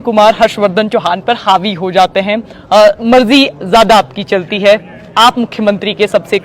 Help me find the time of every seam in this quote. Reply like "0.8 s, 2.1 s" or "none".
none